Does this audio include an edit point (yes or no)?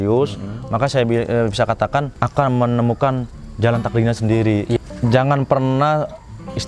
yes